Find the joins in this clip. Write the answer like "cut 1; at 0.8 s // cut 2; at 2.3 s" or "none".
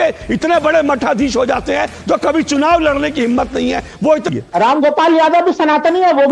cut 1; at 4.3 s